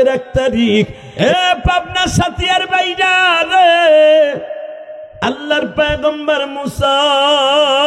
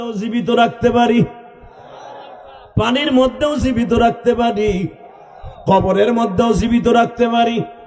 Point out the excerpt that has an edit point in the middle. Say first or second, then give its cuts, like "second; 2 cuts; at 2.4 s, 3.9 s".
first; 1 cut; at 1.0 s